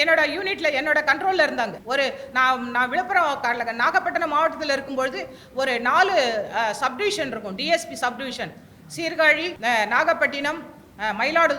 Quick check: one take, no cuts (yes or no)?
no